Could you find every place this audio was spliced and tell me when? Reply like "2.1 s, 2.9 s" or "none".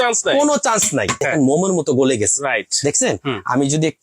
1.2 s